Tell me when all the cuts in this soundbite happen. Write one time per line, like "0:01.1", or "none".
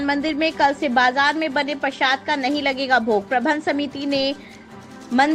none